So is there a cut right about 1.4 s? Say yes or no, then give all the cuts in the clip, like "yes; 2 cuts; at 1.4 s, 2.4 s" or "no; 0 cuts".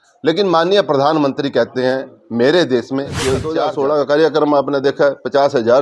no; 1 cut; at 3.5 s